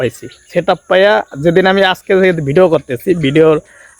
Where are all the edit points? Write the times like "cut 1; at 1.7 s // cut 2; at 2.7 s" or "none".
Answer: none